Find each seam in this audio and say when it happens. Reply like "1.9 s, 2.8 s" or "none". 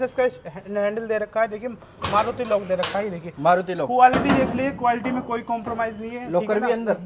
none